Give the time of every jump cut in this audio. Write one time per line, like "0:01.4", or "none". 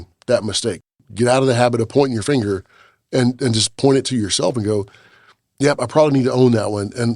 0:00.9